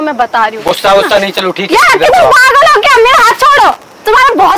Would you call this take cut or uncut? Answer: uncut